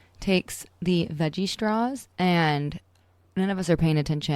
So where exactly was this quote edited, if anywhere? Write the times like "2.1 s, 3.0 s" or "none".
2.0 s